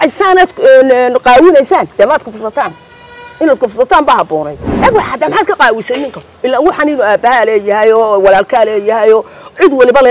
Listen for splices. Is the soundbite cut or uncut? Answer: cut